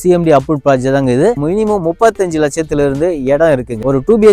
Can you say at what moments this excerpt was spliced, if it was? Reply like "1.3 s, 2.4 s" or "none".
1.4 s